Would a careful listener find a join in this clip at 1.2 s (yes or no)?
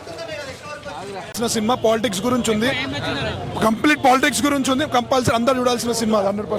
yes